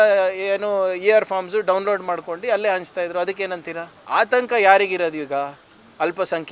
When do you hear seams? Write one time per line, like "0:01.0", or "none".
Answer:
0:03.9